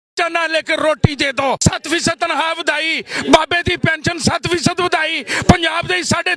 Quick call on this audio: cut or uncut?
cut